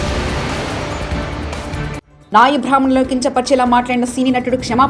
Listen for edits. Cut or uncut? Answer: uncut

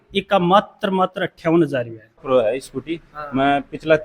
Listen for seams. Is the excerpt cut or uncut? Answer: cut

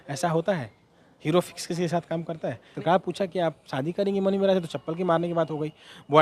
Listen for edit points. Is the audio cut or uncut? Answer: cut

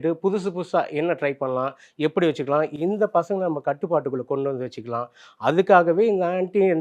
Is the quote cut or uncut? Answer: uncut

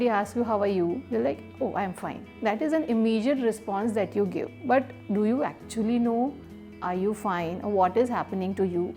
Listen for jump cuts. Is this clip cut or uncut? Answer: uncut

